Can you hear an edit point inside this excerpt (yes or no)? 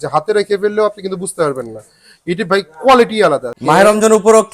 yes